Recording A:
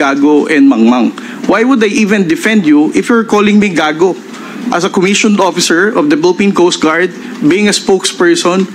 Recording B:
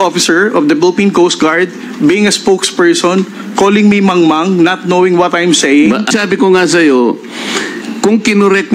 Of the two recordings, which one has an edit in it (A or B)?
B